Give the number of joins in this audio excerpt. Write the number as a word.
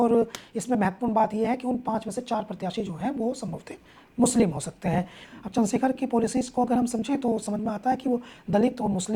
one